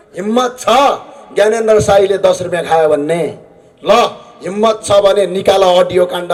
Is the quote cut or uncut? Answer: uncut